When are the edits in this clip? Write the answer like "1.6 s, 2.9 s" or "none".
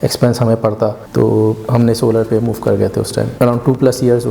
1.0 s, 3.3 s